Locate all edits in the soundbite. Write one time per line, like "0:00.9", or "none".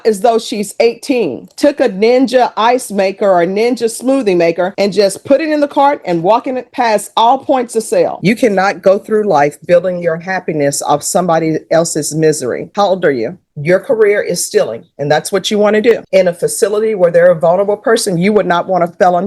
0:01.5
0:08.2
0:13.5
0:16.0